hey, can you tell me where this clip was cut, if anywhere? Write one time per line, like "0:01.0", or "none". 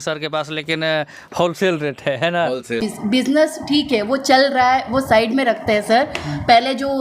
0:02.8